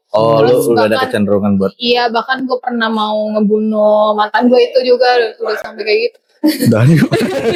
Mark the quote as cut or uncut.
uncut